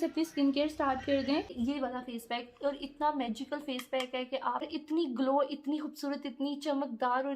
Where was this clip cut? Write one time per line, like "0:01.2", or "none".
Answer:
0:01.5
0:04.7